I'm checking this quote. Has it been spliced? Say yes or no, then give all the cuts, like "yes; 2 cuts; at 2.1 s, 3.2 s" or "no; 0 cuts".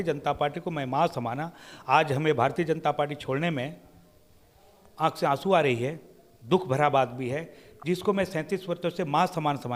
no; 0 cuts